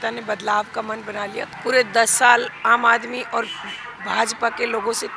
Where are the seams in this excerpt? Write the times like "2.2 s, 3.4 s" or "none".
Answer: 1.4 s